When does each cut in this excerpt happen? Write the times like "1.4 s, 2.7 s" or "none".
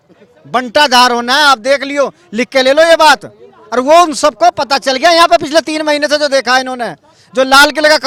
none

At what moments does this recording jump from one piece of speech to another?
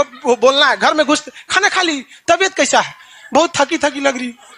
none

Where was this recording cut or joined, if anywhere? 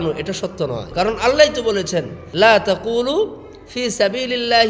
0.9 s, 2.2 s

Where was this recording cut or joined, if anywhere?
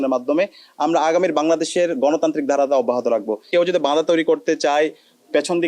3.5 s

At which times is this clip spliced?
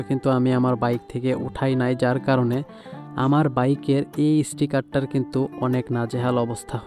none

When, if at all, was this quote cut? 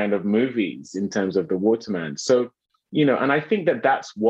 none

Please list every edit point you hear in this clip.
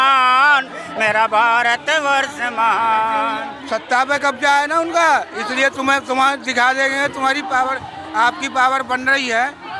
3.5 s

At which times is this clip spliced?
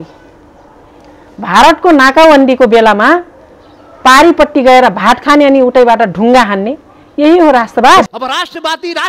8.1 s

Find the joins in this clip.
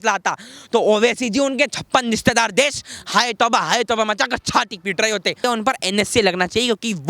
5.4 s

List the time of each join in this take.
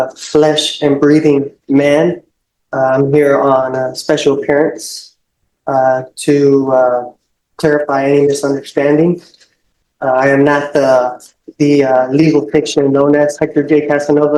none

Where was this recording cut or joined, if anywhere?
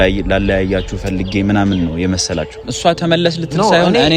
2.7 s

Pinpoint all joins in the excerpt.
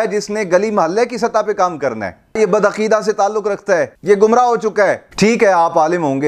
2.4 s, 3.9 s, 5.0 s

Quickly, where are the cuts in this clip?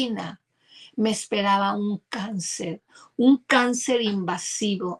none

